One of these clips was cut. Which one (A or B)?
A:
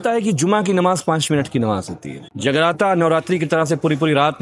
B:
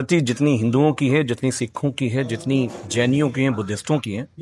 A